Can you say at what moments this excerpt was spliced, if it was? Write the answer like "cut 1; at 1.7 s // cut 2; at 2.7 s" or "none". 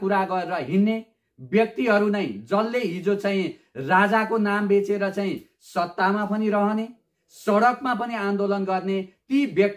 none